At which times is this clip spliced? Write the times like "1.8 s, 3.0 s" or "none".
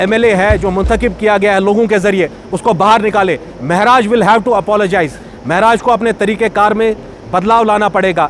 none